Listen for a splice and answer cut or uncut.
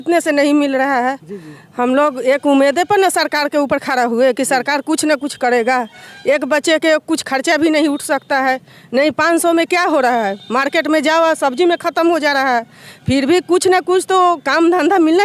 uncut